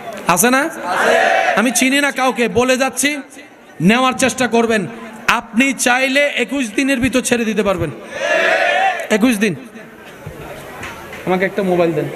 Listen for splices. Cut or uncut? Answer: uncut